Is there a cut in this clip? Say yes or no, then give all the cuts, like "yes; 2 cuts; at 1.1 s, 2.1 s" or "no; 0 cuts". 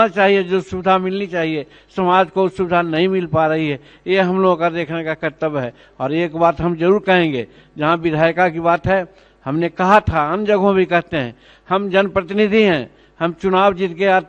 no; 0 cuts